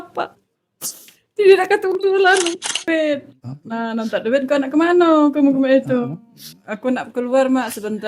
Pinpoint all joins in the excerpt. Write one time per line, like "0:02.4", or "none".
0:02.9